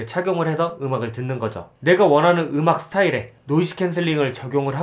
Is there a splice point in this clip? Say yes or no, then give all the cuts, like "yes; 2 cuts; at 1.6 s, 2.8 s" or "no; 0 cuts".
yes; 1 cut; at 1.7 s